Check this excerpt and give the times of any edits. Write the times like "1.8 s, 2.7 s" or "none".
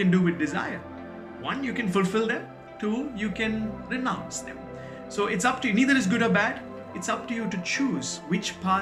none